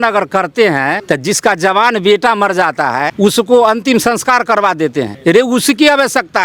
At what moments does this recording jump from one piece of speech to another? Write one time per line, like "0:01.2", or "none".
0:01.0
0:03.1
0:05.1